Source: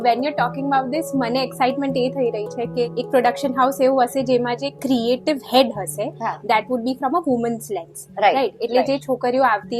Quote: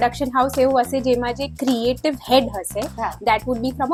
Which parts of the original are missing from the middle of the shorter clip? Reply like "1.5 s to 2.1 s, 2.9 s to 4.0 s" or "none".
none